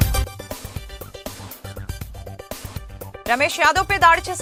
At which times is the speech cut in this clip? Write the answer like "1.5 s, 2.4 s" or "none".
none